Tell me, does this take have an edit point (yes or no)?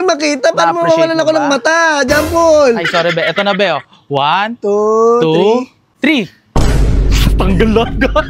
no